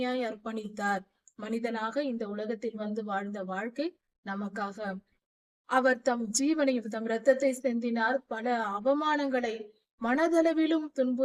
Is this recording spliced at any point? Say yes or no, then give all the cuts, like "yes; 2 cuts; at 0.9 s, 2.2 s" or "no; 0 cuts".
no; 0 cuts